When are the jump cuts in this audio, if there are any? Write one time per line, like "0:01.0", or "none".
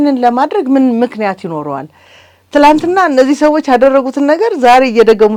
none